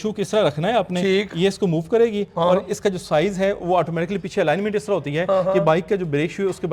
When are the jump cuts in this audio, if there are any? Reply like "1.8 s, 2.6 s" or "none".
none